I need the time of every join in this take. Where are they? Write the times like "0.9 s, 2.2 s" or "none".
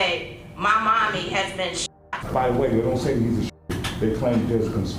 2.1 s